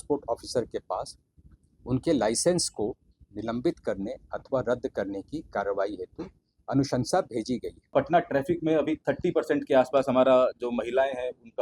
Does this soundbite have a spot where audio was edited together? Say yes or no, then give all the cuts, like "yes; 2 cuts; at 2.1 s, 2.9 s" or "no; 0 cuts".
yes; 1 cut; at 7.9 s